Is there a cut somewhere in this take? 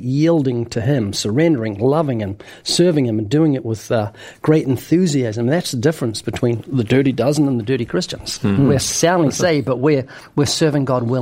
no; 0 cuts

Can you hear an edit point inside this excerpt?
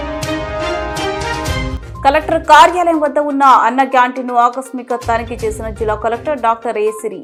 no; 0 cuts

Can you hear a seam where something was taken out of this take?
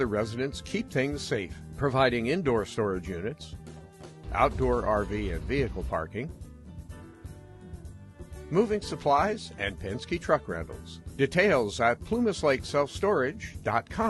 no; 0 cuts

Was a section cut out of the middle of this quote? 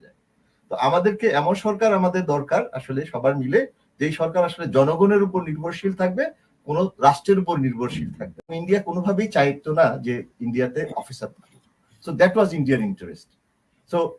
yes; 1 cut; at 8.6 s

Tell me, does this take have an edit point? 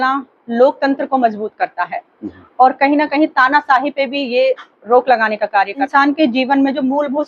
yes; 1 cut; at 5.9 s

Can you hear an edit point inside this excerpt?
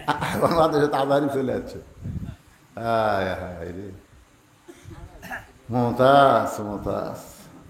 no; 0 cuts

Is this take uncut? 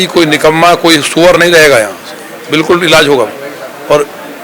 yes; 0 cuts

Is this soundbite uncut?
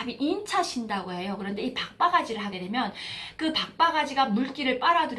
yes; 0 cuts

